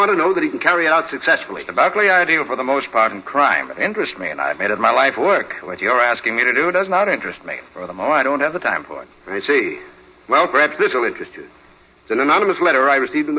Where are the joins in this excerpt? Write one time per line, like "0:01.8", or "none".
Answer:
0:09.3